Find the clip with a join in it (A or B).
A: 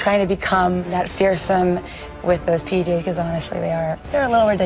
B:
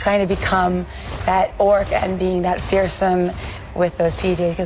A